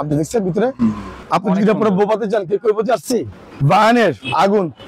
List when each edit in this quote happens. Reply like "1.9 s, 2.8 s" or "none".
1.1 s, 3.4 s